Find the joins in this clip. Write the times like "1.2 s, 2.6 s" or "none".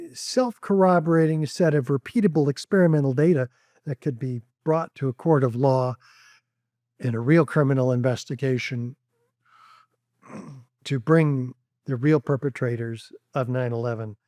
none

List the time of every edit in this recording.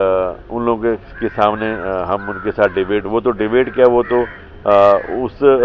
none

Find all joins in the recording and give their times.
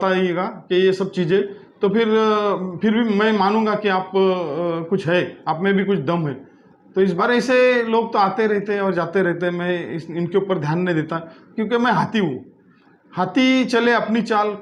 7.2 s

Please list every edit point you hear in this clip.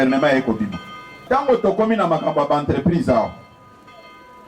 1.2 s

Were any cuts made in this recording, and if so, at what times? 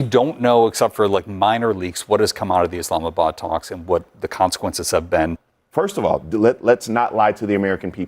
5.5 s

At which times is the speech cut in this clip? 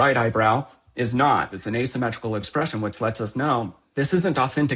1.6 s, 3.8 s

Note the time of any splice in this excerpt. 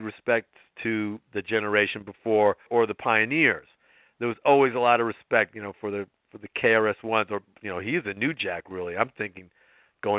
2.7 s

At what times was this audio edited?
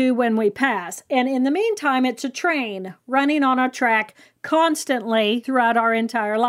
5.4 s

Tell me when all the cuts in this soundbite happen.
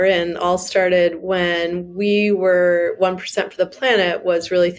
none

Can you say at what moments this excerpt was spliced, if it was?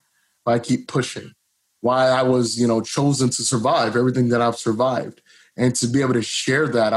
none

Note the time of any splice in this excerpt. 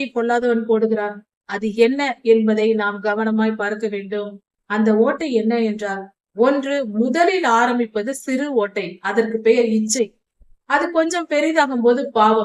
none

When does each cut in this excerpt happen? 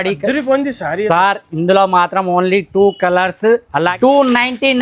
3.9 s

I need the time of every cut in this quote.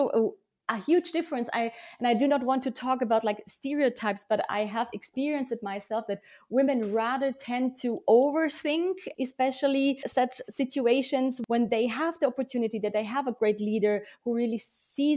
9.1 s, 10.0 s, 11.4 s

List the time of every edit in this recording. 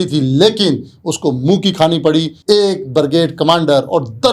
2.3 s

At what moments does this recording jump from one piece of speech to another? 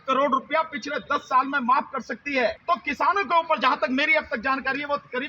2.6 s

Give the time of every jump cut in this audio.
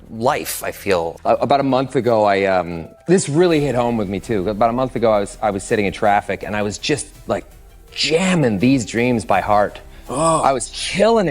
1.2 s

